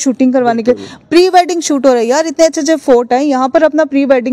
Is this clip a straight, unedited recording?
yes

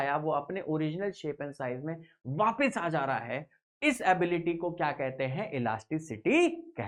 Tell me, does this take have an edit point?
no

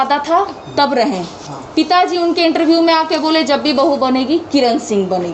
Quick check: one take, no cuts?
yes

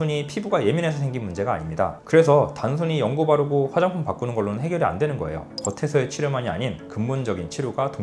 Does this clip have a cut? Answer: yes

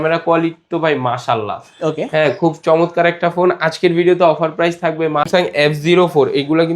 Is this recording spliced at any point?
yes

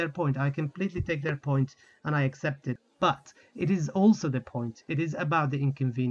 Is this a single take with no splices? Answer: no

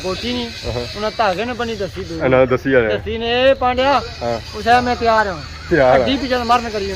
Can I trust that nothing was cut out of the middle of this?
yes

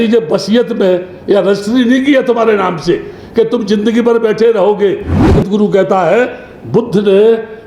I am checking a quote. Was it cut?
yes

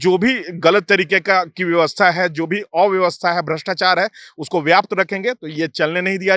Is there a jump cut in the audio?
no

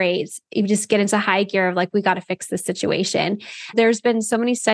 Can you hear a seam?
yes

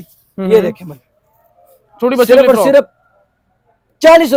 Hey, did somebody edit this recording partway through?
no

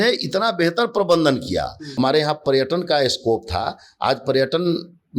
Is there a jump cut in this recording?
yes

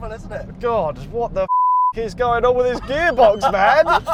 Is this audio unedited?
yes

